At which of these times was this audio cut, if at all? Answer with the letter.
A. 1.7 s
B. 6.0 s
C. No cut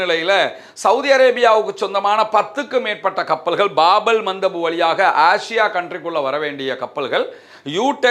C